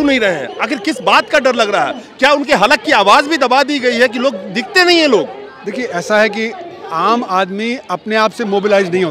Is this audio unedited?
yes; 0 cuts

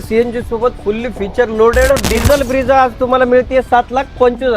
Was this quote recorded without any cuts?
no; 1 cut; at 1.9 s

